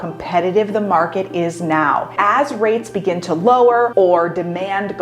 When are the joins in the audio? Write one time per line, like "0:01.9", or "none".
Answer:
0:02.1

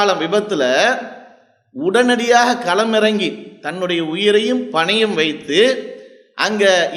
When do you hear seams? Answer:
none

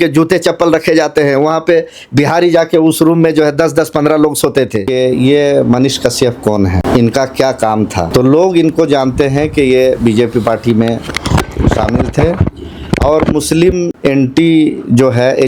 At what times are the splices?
0:04.9
0:06.8
0:08.1
0:13.9

